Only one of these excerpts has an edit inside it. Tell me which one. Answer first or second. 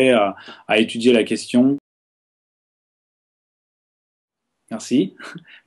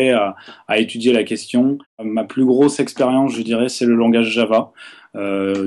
second